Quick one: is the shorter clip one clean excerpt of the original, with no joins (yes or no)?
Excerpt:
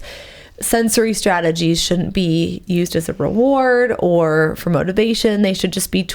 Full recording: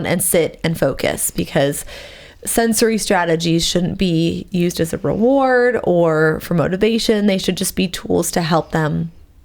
yes